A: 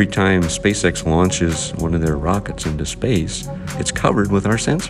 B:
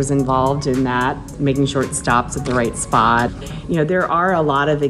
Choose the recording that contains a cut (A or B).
B